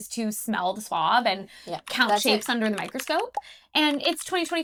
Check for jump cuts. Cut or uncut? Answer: uncut